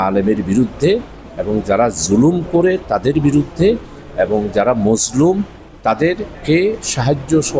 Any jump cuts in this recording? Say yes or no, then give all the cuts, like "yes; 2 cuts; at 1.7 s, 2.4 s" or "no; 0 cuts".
yes; 1 cut; at 6.3 s